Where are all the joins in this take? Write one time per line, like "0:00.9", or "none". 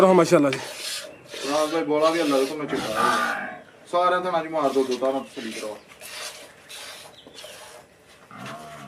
none